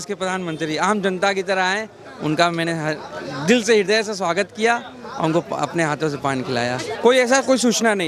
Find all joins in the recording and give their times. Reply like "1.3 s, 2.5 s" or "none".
6.9 s